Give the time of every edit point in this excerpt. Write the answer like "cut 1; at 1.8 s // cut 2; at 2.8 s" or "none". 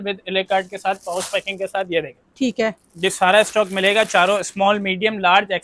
none